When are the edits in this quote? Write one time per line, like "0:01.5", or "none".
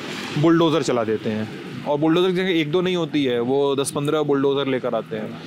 none